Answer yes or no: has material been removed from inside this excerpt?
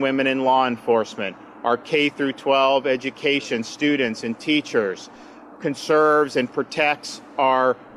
yes